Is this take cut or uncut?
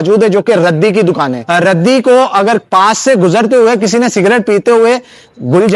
cut